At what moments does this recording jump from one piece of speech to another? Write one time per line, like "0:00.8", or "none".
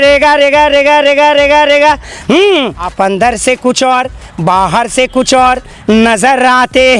0:02.9